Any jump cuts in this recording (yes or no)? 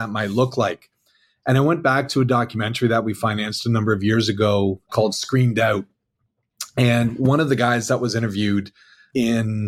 no